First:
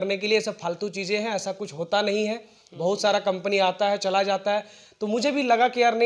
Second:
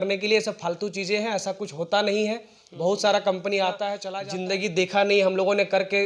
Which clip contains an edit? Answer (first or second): second